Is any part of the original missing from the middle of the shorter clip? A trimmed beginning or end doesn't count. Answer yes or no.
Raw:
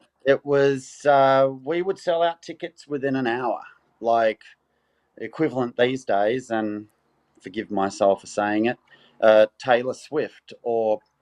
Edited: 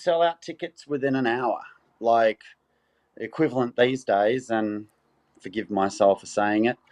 no